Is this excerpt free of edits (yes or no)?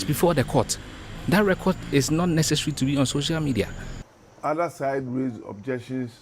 no